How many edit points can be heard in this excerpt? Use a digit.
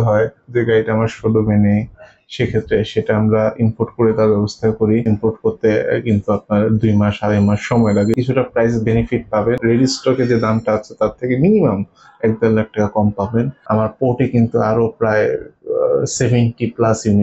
4